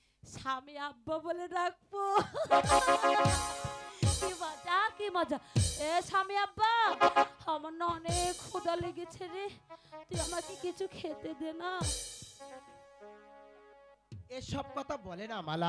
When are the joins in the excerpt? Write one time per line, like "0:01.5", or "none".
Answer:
none